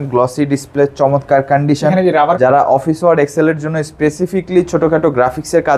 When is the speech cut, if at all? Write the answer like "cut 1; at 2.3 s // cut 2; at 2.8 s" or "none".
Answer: cut 1; at 2.4 s